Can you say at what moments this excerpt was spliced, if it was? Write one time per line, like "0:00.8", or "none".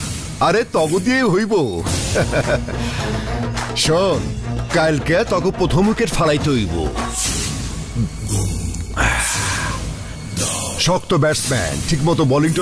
none